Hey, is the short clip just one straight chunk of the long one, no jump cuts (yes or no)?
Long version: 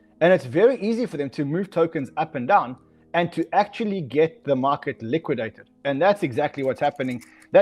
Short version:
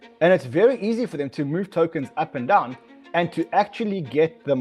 yes